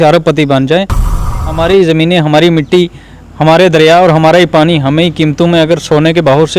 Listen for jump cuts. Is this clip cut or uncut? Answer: cut